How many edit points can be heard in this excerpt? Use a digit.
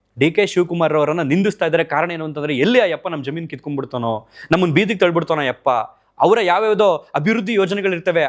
0